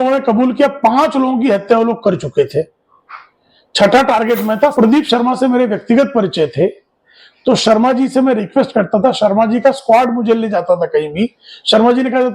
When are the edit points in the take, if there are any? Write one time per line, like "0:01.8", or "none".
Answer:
0:04.7